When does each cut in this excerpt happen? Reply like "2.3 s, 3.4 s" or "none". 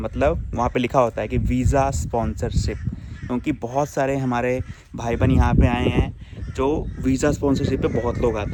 none